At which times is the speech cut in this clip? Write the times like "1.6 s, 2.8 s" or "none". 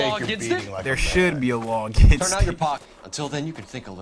2.8 s